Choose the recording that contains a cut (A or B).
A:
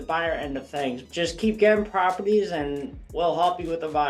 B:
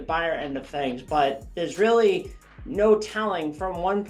A